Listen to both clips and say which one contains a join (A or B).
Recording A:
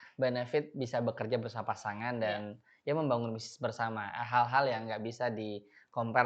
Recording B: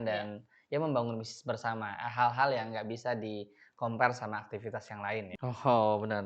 B